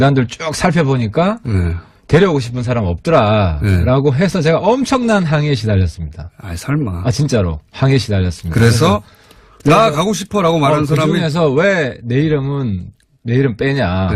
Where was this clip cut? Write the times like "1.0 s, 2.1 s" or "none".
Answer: 2.3 s